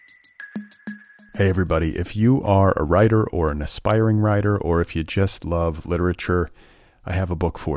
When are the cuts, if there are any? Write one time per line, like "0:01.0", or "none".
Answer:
0:00.9